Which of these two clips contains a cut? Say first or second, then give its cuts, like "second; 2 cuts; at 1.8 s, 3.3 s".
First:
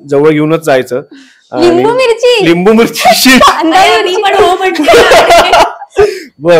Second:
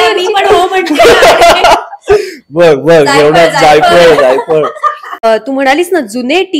second; 1 cut; at 5.2 s